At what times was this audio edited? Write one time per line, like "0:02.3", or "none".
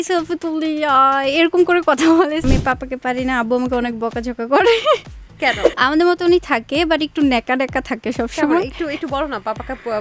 0:02.4
0:05.7